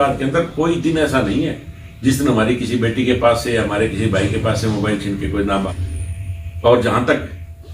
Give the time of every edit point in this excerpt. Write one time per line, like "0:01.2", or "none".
0:05.7